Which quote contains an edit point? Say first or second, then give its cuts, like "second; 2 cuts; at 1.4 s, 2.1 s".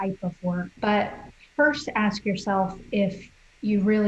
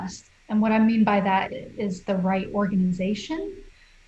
second; 1 cut; at 1.5 s